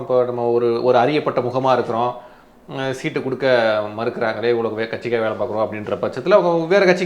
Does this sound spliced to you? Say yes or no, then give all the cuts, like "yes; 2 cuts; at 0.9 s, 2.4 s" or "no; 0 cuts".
no; 0 cuts